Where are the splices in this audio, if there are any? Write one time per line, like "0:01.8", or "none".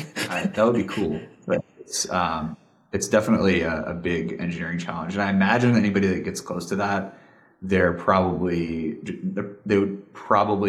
none